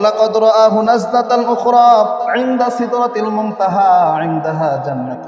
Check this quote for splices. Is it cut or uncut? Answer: uncut